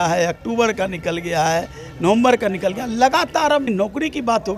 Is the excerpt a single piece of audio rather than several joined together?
no; 1 cut; at 3.7 s

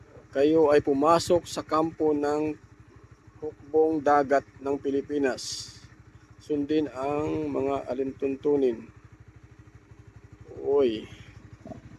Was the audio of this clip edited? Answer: no; 0 cuts

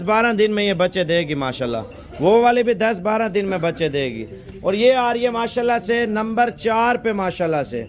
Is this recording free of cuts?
yes; 0 cuts

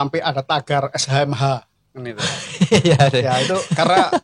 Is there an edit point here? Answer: no; 0 cuts

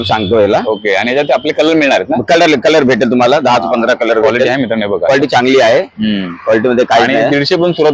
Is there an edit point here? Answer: no; 0 cuts

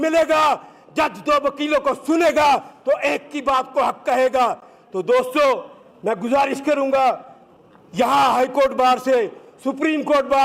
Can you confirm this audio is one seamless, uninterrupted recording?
yes; 0 cuts

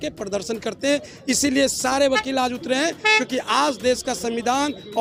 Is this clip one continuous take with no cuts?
yes; 0 cuts

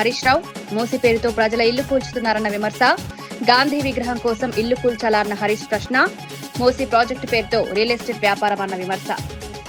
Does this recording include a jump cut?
no; 0 cuts

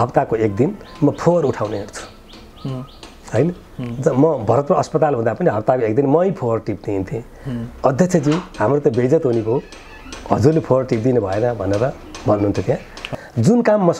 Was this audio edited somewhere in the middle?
yes; 1 cut; at 13.1 s

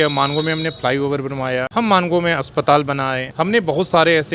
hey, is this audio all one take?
no; 2 cuts; at 1.7 s, 3.2 s

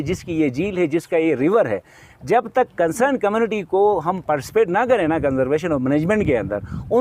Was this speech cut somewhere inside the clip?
no; 0 cuts

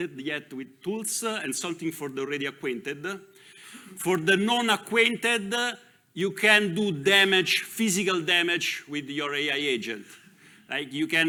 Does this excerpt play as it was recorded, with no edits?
yes; 0 cuts

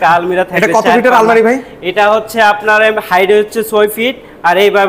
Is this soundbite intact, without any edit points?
yes; 0 cuts

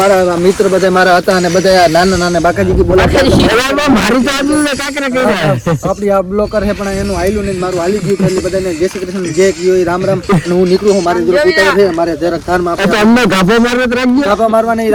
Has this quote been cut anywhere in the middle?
no; 0 cuts

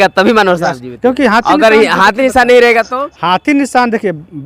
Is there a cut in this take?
no; 0 cuts

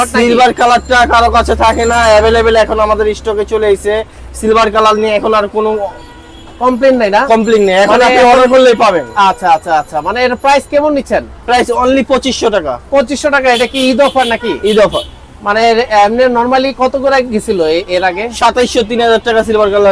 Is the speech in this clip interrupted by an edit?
no; 0 cuts

